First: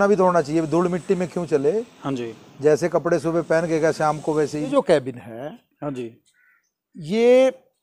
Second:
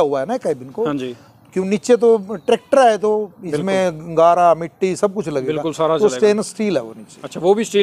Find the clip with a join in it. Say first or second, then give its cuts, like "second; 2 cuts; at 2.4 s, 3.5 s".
first; 1 cut; at 4.7 s